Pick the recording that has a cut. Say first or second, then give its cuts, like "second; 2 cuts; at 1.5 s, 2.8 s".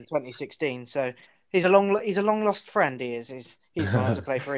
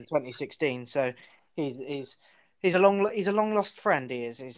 first; 1 cut; at 1.3 s